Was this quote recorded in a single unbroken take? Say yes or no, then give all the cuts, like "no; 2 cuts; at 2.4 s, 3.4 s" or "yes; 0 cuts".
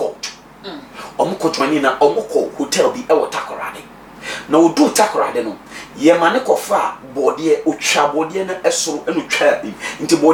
yes; 0 cuts